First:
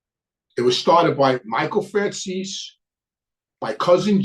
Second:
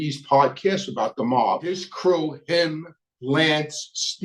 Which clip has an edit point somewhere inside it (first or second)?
second